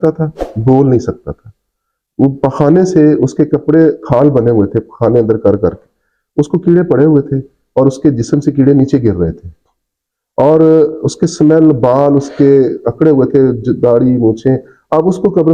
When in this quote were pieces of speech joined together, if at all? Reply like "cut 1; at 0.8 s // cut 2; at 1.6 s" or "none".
none